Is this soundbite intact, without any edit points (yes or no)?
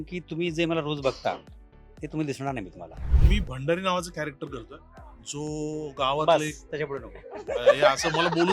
no